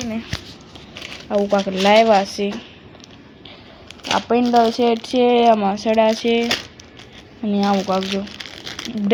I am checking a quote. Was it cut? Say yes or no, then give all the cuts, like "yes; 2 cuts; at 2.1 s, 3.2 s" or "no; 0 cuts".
no; 0 cuts